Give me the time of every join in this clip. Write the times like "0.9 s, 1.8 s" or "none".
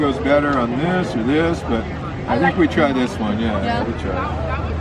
none

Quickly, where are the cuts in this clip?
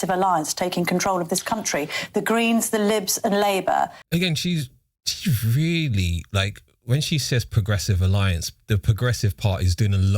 4.0 s

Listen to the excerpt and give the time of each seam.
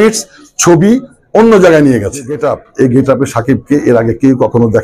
2.4 s

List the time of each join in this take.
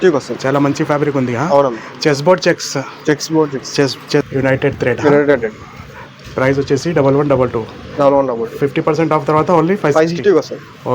4.3 s

